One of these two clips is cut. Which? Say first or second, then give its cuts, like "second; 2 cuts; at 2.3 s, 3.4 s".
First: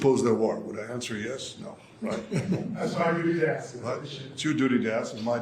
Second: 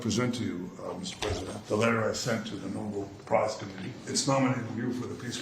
second; 2 cuts; at 1.6 s, 4.1 s